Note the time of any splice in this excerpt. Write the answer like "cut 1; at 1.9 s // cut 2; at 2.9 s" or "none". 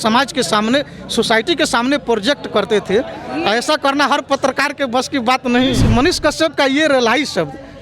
cut 1; at 5.8 s